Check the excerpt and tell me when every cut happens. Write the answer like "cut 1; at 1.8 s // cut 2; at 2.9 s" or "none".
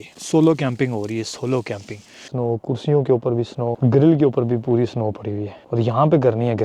cut 1; at 2.2 s

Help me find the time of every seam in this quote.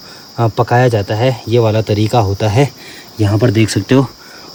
none

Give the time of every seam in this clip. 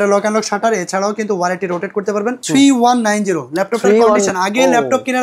cut 1; at 2.4 s

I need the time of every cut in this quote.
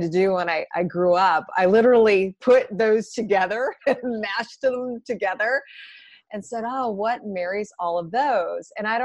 none

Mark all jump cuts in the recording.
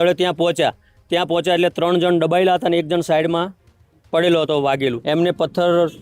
cut 1; at 5.0 s

